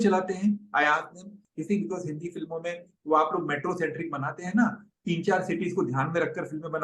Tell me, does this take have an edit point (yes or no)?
yes